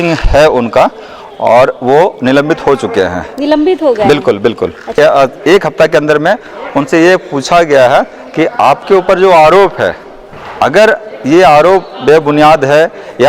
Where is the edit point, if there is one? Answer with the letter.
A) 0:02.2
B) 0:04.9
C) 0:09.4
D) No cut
B